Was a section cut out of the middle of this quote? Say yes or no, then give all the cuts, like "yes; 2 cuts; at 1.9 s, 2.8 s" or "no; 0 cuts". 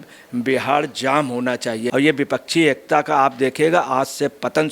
yes; 1 cut; at 1.9 s